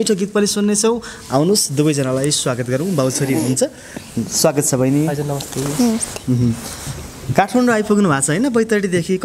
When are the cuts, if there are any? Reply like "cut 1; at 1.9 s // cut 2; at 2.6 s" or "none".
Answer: none